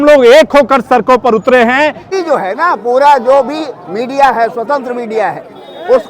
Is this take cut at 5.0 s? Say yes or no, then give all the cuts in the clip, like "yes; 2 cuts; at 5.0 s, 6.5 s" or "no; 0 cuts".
no; 1 cut; at 2.0 s